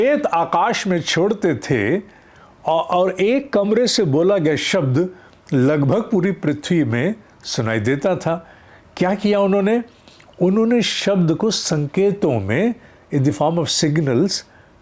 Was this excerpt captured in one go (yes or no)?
yes